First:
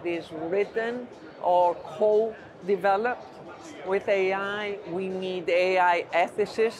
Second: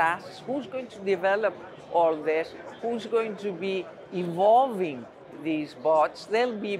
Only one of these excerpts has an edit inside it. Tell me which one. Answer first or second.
second